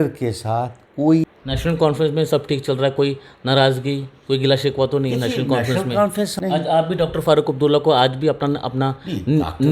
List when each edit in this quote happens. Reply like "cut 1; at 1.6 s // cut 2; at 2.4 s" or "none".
cut 1; at 1.4 s // cut 2; at 6.3 s